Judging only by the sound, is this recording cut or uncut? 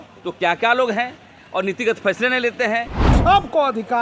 cut